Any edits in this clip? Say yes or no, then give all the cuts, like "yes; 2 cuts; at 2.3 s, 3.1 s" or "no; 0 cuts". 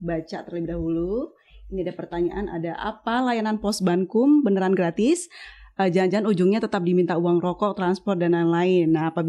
no; 0 cuts